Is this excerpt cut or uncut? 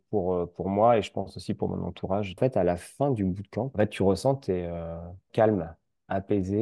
cut